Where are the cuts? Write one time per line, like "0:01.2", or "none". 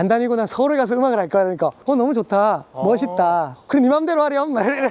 none